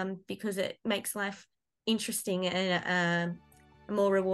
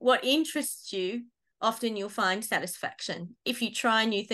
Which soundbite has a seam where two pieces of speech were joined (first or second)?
second